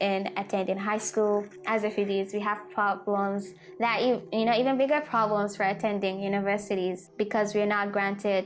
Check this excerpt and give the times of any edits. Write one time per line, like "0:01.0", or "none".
none